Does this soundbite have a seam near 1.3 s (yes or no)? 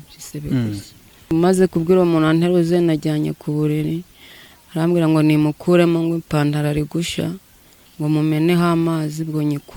yes